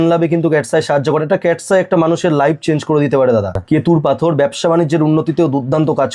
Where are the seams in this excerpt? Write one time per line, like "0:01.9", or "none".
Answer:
0:03.6

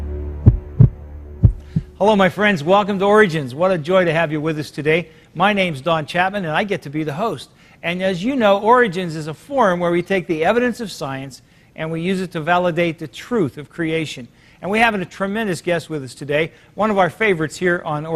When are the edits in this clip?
none

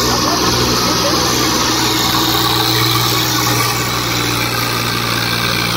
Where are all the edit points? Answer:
none

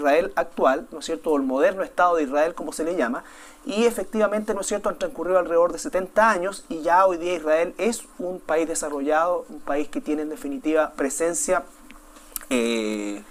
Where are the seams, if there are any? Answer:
none

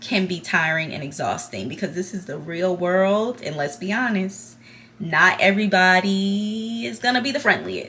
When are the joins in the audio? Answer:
none

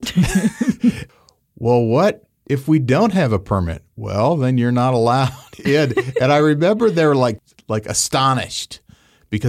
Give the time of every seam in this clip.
0:01.0
0:07.5

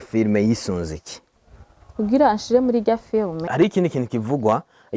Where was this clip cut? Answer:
0:03.4

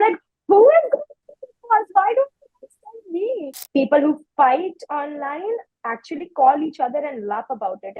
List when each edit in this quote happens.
0:03.5

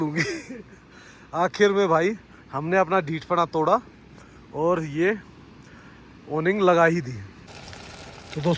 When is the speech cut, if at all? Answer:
0:07.7

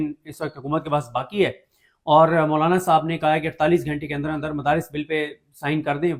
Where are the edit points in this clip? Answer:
none

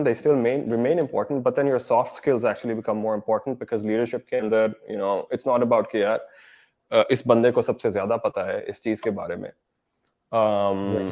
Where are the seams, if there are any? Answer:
none

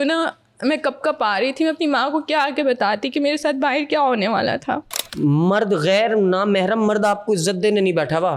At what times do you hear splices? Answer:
0:05.0

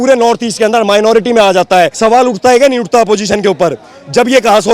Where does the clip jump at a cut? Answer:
0:01.9

